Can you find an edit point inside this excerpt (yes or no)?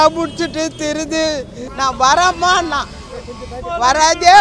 yes